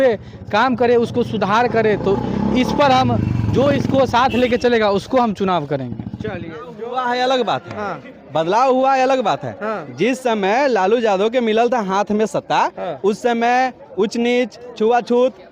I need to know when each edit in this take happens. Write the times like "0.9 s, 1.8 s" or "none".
6.6 s